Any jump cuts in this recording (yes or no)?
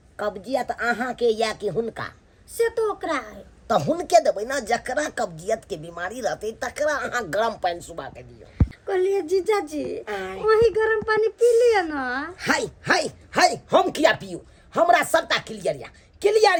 no